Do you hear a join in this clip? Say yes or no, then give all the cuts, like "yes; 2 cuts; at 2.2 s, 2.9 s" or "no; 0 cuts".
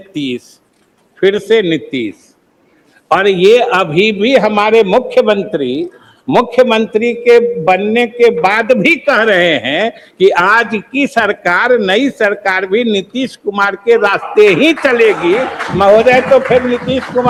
no; 0 cuts